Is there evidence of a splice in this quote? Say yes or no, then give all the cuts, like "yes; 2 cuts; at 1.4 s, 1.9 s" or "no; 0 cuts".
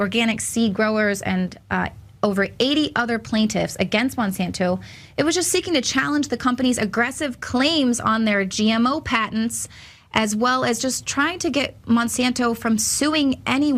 no; 0 cuts